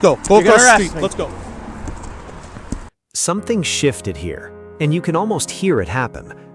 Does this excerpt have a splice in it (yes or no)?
no